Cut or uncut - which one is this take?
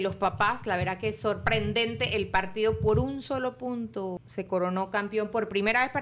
cut